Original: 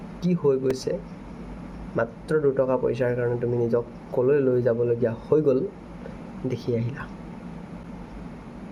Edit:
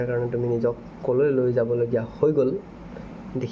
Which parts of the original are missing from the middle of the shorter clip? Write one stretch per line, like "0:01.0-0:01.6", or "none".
none